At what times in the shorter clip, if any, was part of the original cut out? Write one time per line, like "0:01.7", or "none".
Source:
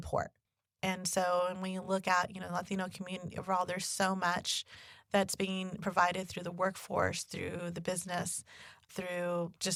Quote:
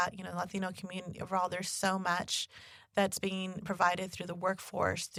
none